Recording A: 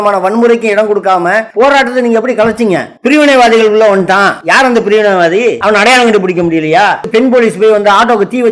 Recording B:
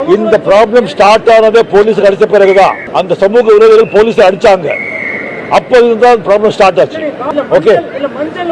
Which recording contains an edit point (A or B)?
A